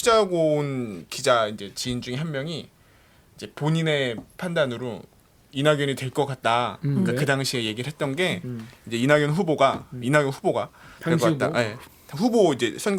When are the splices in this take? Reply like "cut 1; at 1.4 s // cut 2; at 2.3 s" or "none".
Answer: none

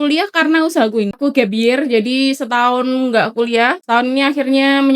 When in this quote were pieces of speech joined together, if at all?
cut 1; at 1.2 s // cut 2; at 3.8 s

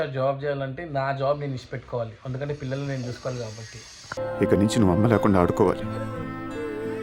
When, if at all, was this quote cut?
none

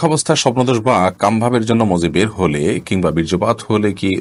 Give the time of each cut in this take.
none

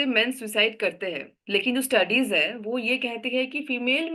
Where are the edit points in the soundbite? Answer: none

